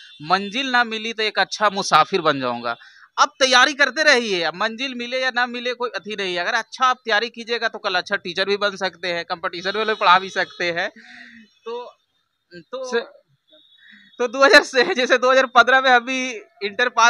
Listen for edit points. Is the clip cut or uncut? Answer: uncut